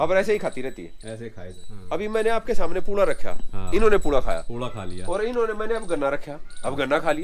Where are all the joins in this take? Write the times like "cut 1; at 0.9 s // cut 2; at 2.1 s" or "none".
cut 1; at 1.7 s